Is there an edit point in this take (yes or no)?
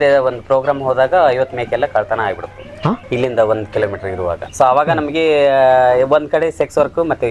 no